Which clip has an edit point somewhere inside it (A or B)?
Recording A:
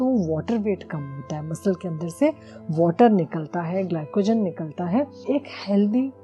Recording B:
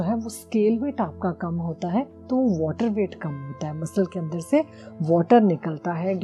A